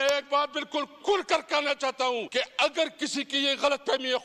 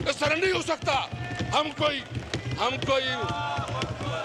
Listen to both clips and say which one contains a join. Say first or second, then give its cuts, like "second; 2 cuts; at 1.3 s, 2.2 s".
first; 1 cut; at 2.3 s